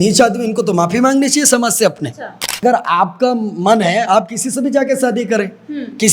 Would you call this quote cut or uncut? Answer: cut